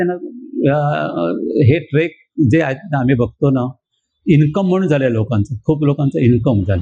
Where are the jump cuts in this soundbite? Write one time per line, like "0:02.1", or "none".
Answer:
none